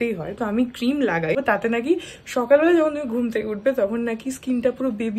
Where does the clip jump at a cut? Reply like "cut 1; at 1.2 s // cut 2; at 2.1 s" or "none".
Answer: cut 1; at 1.3 s

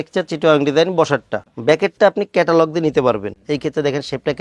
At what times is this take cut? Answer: cut 1; at 3.3 s

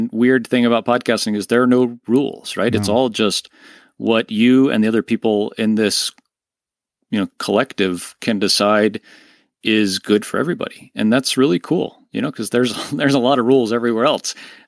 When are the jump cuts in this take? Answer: none

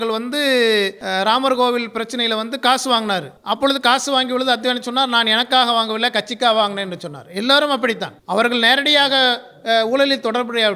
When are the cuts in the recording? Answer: cut 1; at 1.0 s // cut 2; at 3.3 s // cut 3; at 8.1 s

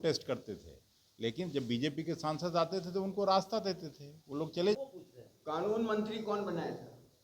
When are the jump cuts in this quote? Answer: cut 1; at 4.8 s

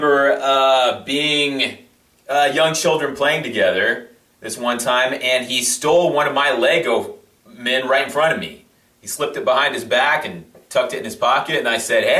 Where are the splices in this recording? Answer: cut 1; at 6.2 s

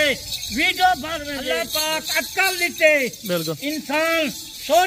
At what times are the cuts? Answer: cut 1; at 1.3 s

